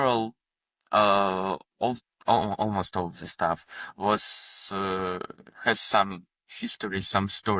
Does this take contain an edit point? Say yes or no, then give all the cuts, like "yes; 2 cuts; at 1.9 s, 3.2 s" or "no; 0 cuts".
yes; 1 cut; at 2.1 s